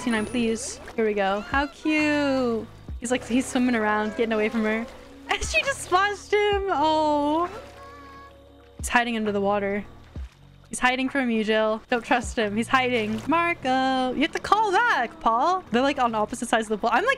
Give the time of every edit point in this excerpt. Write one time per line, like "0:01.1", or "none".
none